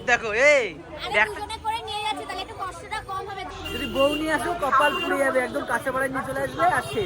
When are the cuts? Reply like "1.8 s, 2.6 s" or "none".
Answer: 3.5 s

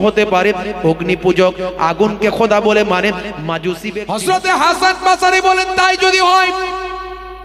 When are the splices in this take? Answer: 3.8 s

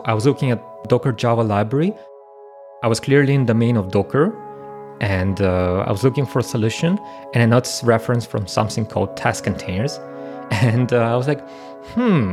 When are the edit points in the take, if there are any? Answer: 0.8 s, 2.4 s

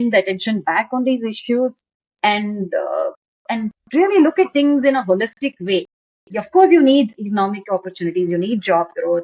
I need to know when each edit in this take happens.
none

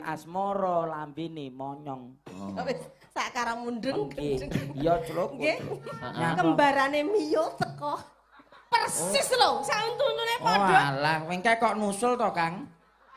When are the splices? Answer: 5.9 s

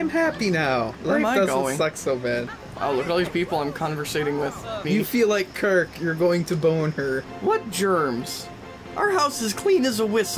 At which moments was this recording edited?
1.0 s, 2.5 s, 4.8 s, 7.3 s

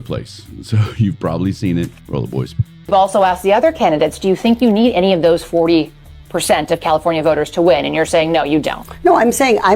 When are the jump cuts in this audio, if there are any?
2.0 s

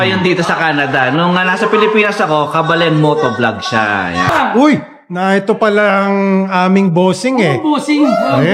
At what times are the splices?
4.3 s

